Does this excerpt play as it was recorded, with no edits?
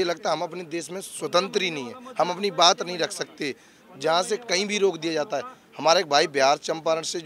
yes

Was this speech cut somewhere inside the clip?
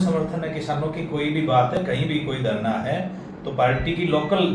no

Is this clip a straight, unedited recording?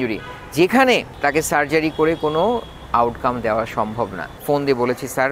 no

